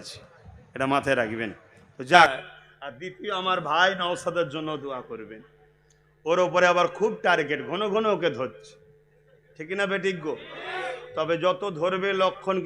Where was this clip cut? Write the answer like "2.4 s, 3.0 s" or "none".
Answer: 2.3 s